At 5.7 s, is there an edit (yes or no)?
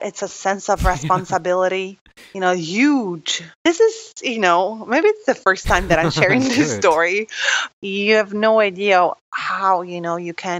no